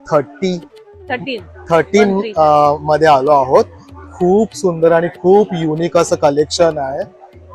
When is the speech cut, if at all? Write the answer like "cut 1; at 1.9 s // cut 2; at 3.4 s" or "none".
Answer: none

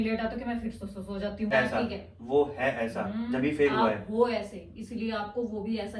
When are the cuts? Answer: cut 1; at 1.5 s

